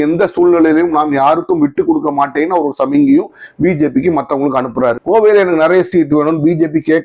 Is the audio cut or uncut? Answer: cut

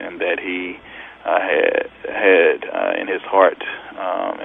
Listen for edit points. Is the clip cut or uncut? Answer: uncut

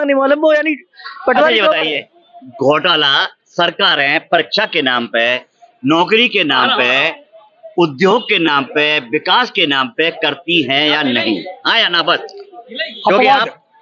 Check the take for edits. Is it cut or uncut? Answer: uncut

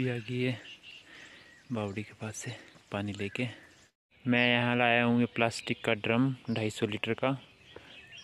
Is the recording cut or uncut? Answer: cut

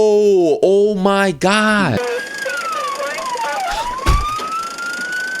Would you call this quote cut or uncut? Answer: cut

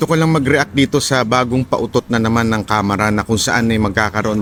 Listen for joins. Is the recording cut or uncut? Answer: uncut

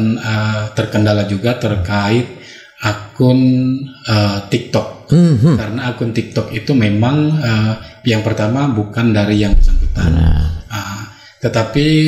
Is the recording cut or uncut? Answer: uncut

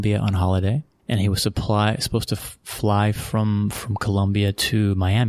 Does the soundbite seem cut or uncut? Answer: uncut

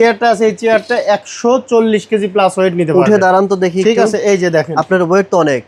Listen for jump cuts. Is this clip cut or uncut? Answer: uncut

